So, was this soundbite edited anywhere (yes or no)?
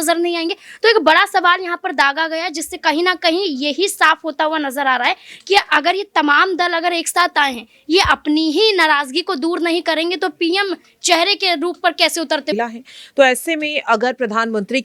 yes